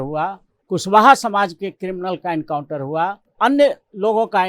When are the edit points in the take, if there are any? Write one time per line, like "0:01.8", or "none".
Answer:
0:03.2